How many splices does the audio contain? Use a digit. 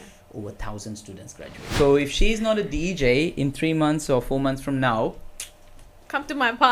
1